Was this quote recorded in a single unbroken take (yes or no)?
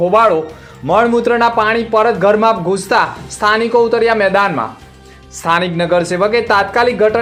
yes